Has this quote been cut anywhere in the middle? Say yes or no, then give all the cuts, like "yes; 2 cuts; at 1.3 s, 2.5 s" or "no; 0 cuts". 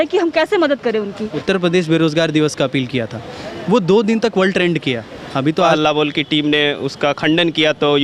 yes; 2 cuts; at 1.3 s, 5.7 s